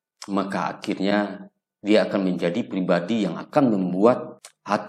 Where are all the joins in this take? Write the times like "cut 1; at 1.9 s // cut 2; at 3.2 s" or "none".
none